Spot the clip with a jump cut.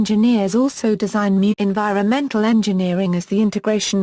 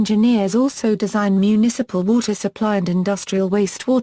second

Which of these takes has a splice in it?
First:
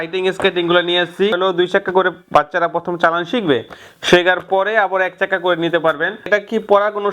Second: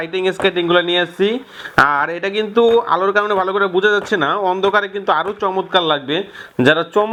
first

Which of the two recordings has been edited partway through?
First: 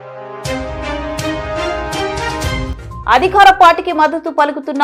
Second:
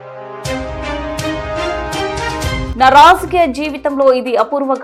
first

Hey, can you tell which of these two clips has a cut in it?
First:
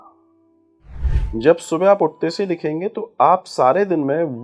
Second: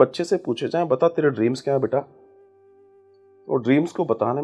first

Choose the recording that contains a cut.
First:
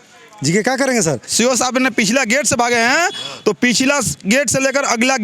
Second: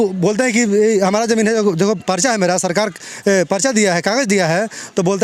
first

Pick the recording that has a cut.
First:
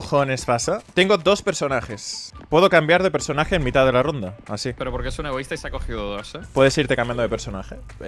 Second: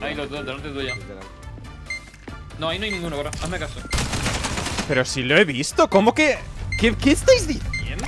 first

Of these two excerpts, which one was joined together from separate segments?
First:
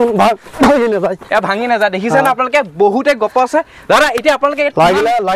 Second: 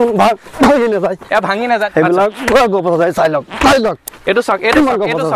second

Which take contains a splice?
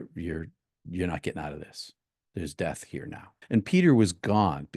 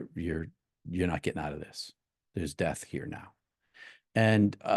first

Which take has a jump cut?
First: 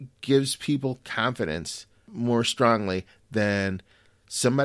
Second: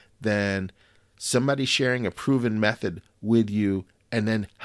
first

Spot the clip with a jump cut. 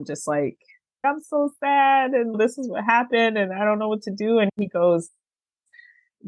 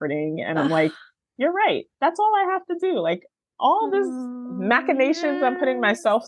first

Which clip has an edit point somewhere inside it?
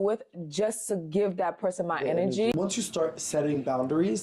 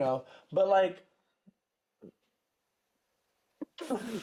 first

